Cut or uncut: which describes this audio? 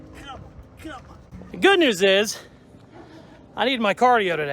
cut